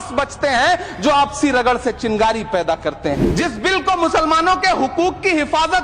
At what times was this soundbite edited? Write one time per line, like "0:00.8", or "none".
0:03.3